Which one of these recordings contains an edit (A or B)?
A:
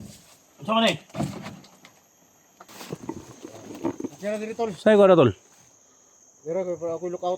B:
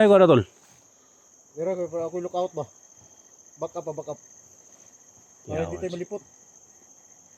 A